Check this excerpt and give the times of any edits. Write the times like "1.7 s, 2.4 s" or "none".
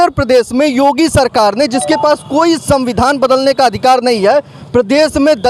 none